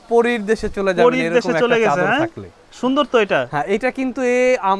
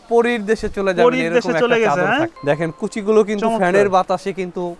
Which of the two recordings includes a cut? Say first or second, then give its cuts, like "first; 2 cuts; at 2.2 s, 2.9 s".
second; 1 cut; at 2.4 s